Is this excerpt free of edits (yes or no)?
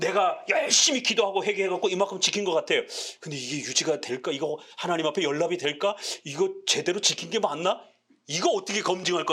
yes